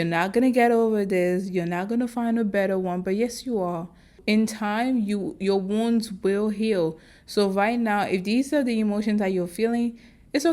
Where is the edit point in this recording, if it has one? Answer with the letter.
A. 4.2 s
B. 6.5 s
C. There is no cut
A